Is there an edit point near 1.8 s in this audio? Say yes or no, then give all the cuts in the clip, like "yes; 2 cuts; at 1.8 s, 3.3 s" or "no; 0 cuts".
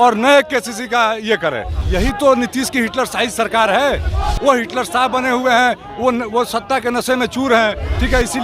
yes; 1 cut; at 1.8 s